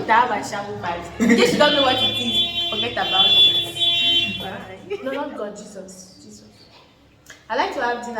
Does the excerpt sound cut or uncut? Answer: cut